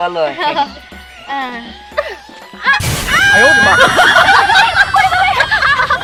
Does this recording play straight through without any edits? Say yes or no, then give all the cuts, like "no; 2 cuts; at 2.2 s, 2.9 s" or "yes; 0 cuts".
yes; 0 cuts